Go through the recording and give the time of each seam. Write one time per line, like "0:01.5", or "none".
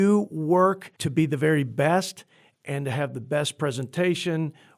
0:00.9